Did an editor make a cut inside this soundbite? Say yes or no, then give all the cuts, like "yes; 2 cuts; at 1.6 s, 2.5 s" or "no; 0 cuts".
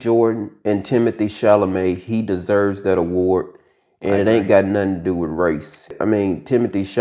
yes; 1 cut; at 6.0 s